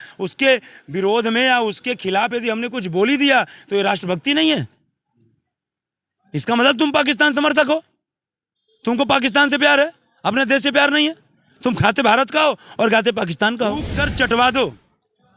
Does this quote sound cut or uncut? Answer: cut